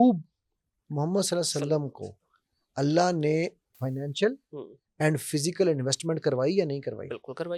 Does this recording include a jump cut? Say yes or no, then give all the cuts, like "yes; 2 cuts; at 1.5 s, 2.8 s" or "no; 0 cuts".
no; 0 cuts